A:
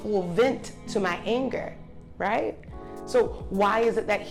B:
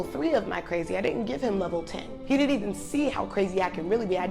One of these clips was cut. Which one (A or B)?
B